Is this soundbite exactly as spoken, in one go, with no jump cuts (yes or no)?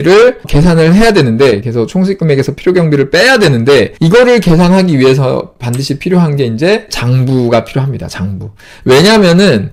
yes